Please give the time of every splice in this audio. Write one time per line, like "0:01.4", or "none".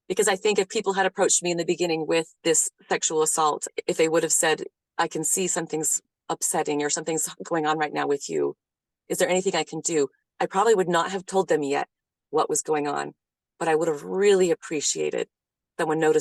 none